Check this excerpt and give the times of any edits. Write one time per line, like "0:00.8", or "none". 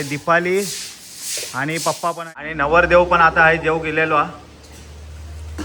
0:02.5